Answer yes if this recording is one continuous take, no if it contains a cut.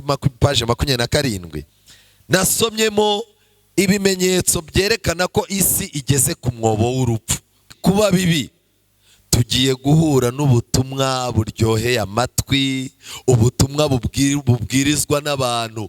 no